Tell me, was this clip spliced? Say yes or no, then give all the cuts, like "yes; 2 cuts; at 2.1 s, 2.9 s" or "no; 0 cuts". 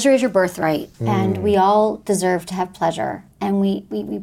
yes; 2 cuts; at 0.9 s, 3.3 s